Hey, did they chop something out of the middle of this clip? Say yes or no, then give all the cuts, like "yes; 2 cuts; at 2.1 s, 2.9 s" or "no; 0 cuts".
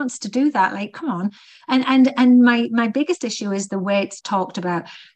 yes; 1 cut; at 4.2 s